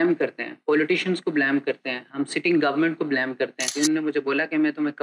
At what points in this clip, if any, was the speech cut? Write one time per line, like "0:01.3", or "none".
0:03.7